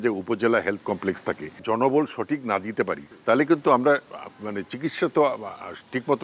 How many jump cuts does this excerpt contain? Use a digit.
2